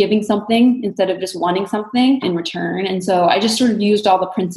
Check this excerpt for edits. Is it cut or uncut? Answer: cut